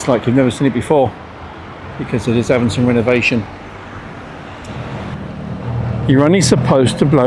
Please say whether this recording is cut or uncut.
cut